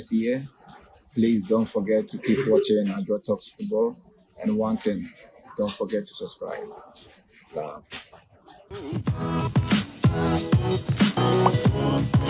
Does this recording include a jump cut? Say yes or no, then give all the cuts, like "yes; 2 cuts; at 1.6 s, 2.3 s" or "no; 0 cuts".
no; 0 cuts